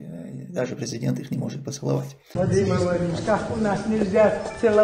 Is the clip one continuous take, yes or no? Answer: no